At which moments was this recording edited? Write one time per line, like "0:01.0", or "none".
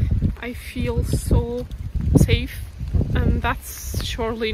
0:01.9
0:02.8